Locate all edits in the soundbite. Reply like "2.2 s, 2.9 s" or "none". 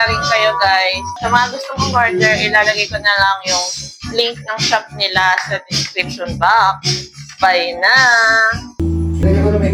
none

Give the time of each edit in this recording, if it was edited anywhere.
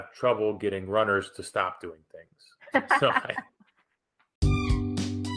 4.3 s

